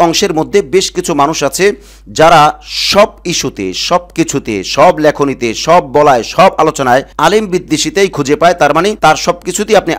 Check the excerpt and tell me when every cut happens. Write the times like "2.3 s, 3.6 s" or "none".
none